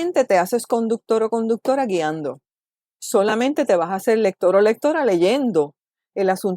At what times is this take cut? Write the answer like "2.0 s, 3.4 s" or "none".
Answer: 2.4 s